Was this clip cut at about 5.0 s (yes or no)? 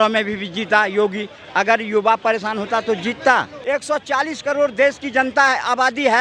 no